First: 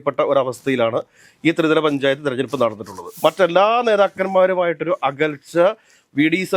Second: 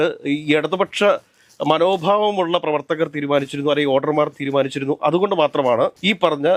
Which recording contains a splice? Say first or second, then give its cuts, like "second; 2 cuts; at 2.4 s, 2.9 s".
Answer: first; 1 cut; at 3.0 s